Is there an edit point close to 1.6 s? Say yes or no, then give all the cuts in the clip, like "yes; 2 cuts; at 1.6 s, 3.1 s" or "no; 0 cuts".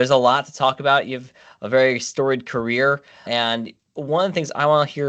no; 1 cut; at 3.3 s